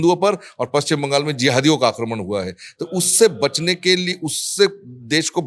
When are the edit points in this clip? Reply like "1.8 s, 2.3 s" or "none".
none